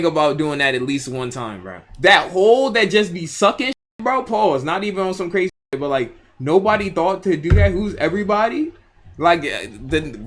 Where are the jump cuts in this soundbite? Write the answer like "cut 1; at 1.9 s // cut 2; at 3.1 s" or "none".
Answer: none